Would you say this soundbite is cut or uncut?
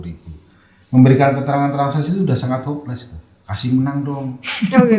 uncut